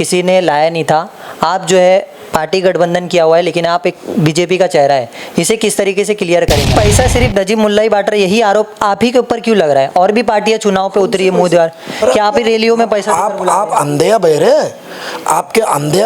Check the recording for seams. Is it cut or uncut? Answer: cut